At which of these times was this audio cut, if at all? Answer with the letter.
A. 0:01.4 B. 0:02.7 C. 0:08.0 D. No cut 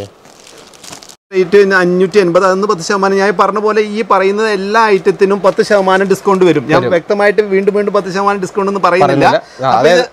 A